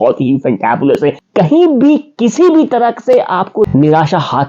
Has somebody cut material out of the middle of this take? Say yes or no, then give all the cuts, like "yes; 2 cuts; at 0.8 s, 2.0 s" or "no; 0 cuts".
yes; 1 cut; at 1.3 s